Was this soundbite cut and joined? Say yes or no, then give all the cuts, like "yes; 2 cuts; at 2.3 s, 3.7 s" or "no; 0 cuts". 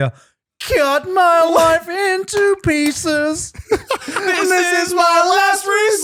no; 0 cuts